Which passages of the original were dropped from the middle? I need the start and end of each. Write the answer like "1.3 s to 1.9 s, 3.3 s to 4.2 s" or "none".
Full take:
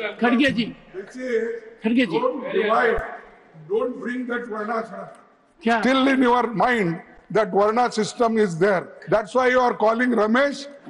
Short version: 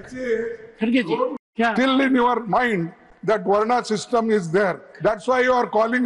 2.4 s to 5.5 s

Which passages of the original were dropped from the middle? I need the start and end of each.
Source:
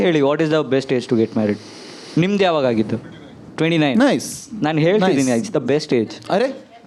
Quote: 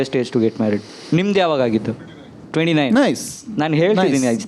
1.7 s to 2.0 s

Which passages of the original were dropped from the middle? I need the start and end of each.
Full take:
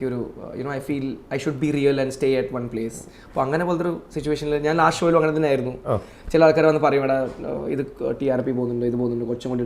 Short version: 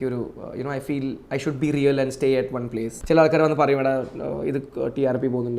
2.9 s to 6.1 s

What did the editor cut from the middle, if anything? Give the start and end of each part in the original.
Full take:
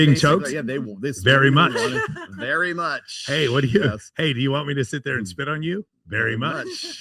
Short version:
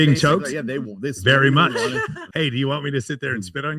2.2 s to 4.1 s

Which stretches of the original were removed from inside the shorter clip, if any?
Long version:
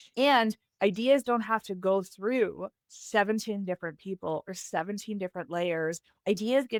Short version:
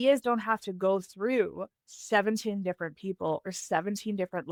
none

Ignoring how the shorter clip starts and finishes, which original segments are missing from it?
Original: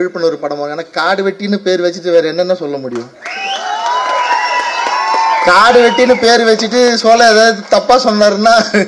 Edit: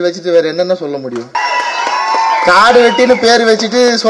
3.2 s to 4.4 s

